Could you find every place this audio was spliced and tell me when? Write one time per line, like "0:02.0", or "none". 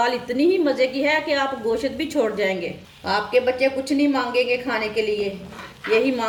none